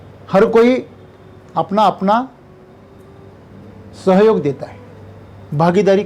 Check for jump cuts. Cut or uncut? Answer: uncut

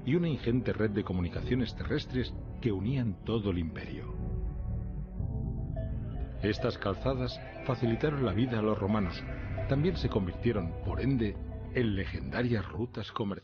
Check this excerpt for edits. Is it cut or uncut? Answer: cut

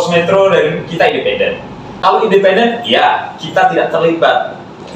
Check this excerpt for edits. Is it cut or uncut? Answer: cut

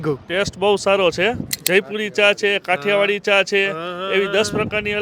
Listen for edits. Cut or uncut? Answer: cut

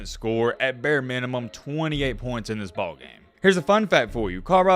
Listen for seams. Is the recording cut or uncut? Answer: cut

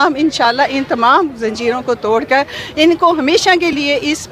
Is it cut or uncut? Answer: uncut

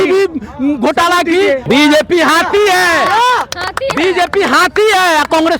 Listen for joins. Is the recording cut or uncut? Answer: cut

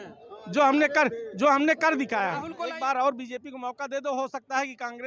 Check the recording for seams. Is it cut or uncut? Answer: cut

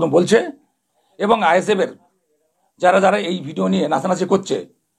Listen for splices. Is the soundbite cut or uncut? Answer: uncut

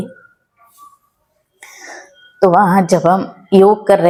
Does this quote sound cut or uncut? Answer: uncut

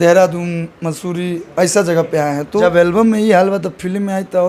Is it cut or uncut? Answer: cut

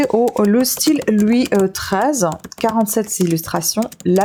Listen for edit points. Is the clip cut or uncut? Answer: uncut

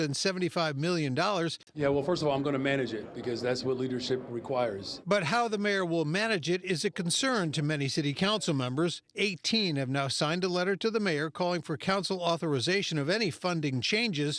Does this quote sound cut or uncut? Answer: cut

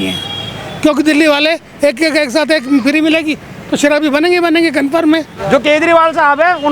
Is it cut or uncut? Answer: cut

